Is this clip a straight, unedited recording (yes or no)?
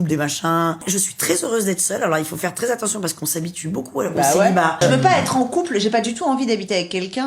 no